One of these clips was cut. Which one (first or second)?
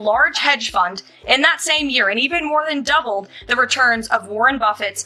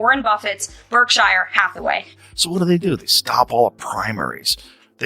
second